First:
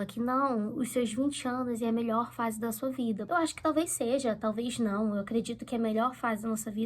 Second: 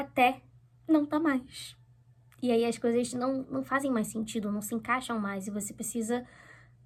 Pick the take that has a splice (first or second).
first